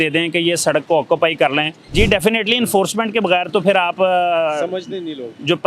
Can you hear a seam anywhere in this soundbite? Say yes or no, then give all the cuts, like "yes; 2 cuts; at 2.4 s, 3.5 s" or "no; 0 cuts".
yes; 1 cut; at 1.8 s